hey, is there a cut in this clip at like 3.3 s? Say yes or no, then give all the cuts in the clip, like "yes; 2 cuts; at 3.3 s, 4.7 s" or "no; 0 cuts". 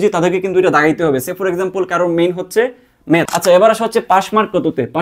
yes; 1 cut; at 3.3 s